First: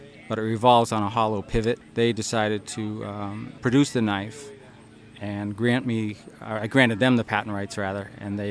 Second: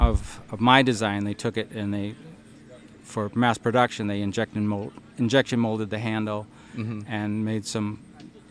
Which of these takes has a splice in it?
first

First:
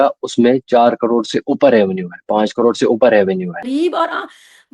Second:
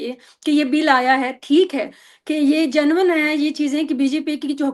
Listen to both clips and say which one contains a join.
first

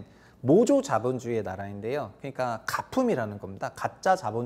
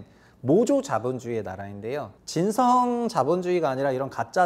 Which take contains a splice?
second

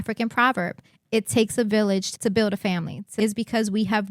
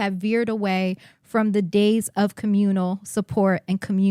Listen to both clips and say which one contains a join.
first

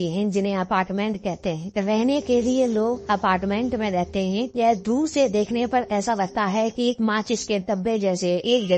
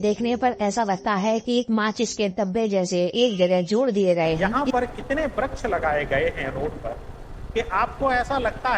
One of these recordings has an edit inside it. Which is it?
second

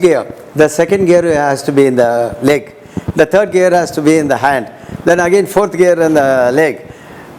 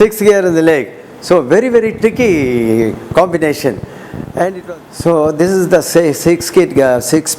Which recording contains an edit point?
second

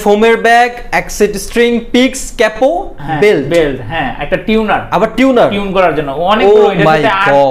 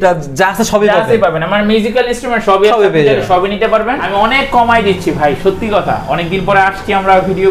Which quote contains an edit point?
second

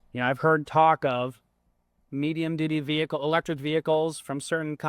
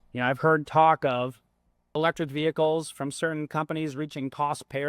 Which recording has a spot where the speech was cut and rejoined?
second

